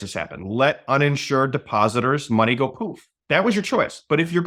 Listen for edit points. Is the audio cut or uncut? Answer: uncut